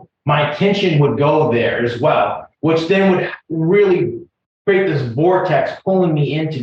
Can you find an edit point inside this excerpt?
no; 0 cuts

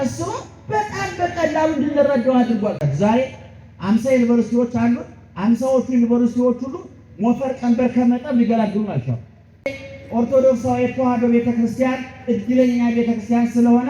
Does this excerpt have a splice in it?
yes; 2 cuts; at 2.9 s, 9.8 s

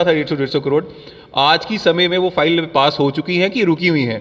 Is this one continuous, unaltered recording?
yes; 0 cuts

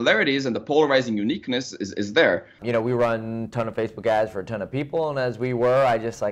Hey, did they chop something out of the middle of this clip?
yes; 1 cut; at 2.5 s

